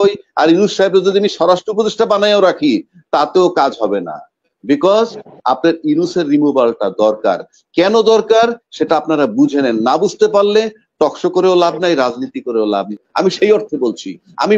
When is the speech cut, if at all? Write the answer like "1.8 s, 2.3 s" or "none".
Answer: 13.0 s